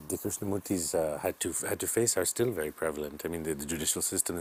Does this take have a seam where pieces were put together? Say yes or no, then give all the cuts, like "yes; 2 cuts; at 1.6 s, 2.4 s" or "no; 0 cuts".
no; 0 cuts